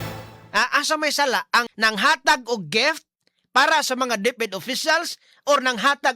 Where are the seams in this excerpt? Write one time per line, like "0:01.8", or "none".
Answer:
0:01.7